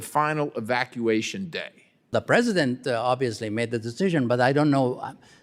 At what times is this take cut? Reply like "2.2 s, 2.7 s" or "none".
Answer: 2.1 s